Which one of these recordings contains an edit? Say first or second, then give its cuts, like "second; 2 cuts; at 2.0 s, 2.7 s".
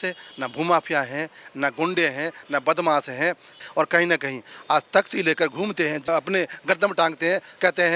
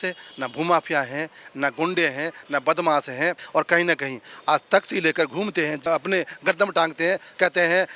second; 1 cut; at 3.4 s